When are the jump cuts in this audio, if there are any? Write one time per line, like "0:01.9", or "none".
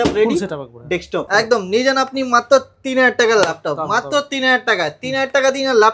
0:01.3